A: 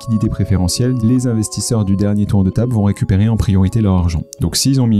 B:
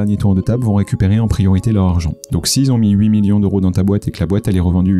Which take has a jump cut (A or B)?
A